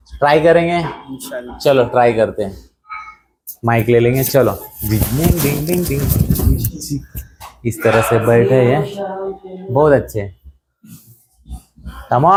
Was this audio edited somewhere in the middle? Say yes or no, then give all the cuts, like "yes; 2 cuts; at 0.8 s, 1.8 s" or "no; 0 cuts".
no; 0 cuts